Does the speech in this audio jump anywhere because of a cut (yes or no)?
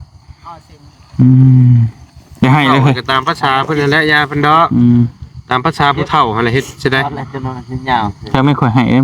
no